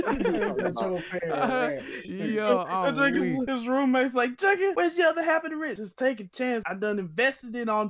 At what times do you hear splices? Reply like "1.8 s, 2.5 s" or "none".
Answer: 3.5 s, 4.7 s, 5.8 s, 6.7 s